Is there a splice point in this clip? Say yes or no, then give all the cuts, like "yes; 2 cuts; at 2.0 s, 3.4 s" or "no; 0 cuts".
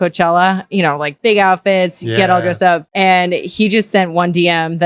no; 0 cuts